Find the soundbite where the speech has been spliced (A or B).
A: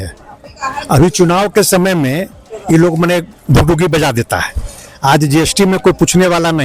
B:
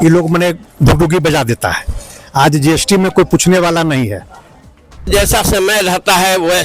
B